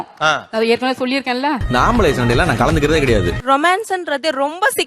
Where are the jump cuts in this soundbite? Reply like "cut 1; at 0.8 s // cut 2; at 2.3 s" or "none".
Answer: cut 1; at 1.6 s // cut 2; at 3.4 s